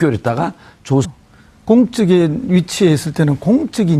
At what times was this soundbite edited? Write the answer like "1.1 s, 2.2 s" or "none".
none